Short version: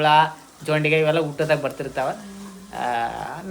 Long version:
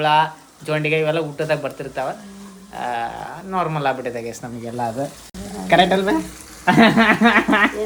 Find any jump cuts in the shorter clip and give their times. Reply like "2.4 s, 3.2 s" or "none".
none